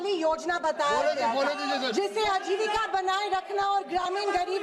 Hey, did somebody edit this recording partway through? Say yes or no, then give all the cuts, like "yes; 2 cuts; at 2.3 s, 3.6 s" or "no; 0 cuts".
no; 0 cuts